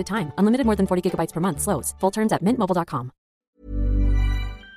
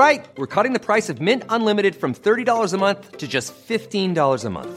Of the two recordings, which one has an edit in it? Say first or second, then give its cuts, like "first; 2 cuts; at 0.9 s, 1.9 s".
first; 1 cut; at 3.3 s